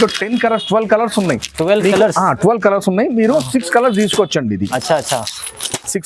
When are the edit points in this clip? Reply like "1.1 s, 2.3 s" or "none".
none